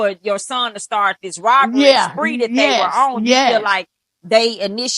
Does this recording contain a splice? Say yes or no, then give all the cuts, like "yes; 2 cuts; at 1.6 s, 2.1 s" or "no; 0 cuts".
no; 0 cuts